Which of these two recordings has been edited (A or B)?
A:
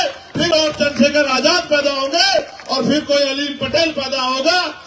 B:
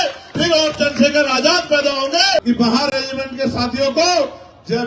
B